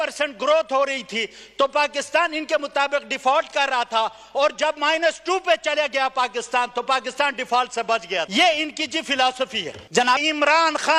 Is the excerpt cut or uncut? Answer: cut